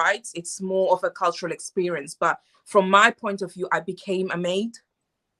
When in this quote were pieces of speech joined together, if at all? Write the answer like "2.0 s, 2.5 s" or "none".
none